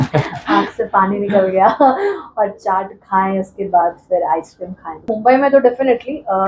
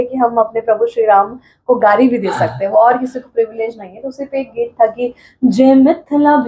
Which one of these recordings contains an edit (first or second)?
first